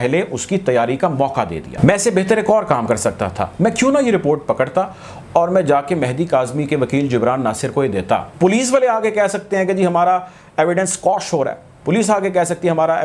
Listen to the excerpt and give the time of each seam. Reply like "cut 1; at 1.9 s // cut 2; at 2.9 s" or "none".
cut 1; at 1.6 s // cut 2; at 8.3 s

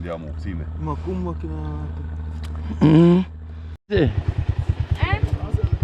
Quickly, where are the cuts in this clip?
cut 1; at 3.8 s

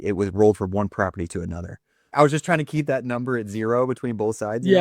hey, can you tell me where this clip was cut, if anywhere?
cut 1; at 2.1 s

